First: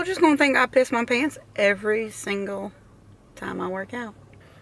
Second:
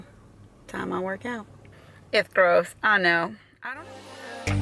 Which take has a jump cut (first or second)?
second